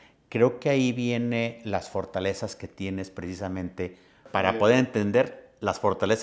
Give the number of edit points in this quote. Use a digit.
1